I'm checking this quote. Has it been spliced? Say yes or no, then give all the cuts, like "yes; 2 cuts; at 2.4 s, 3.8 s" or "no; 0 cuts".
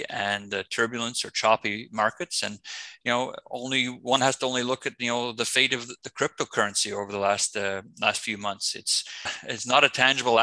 yes; 1 cut; at 9.4 s